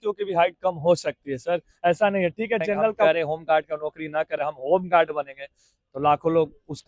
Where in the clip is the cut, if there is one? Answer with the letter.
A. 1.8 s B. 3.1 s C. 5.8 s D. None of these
B